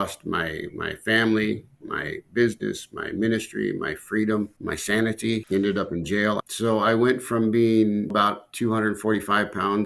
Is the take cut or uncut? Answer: cut